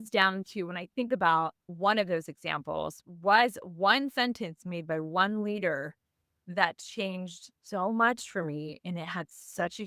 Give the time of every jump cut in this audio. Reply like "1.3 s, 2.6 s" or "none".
1.6 s